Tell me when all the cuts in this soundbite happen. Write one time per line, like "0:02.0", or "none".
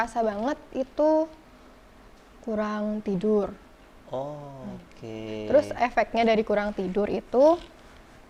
none